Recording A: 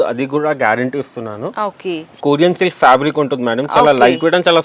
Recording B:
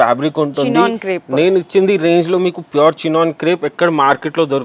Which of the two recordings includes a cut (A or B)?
A